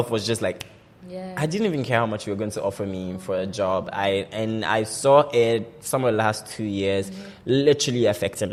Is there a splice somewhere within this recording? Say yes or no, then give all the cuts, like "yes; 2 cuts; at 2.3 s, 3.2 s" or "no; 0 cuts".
no; 0 cuts